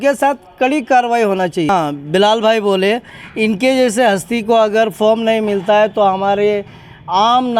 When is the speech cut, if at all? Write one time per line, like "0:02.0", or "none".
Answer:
0:01.7